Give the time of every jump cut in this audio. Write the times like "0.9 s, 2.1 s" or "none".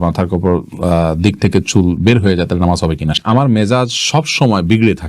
3.2 s